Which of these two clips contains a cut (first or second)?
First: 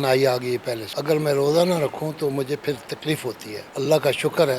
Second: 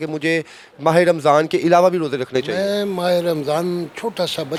first